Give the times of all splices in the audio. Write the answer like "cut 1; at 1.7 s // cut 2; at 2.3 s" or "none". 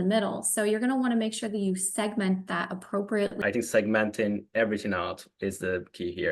cut 1; at 3.4 s